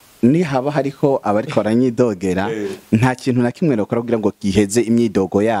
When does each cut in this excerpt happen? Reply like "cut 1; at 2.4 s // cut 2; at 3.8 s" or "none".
none